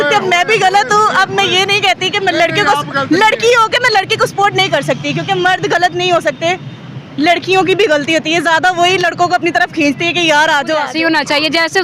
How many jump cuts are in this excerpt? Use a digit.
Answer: 1